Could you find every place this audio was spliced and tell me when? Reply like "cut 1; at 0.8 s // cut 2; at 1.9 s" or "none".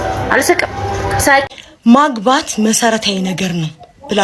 cut 1; at 1.5 s